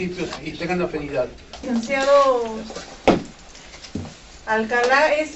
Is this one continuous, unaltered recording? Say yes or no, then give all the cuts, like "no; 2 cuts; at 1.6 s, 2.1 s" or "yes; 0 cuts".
no; 1 cut; at 1.6 s